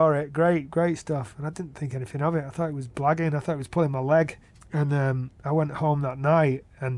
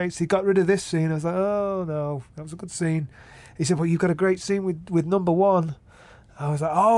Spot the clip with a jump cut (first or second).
first